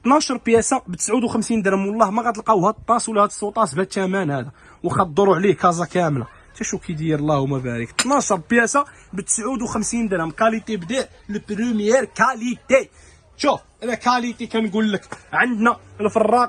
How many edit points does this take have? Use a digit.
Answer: 0